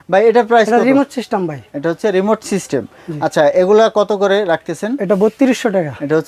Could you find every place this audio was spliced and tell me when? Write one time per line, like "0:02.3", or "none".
none